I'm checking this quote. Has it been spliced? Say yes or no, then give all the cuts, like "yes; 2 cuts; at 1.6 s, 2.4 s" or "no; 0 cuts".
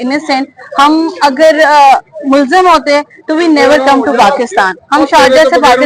no; 0 cuts